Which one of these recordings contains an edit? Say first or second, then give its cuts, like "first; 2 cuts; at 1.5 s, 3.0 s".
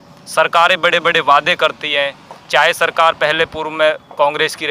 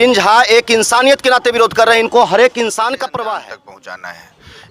second; 1 cut; at 3.4 s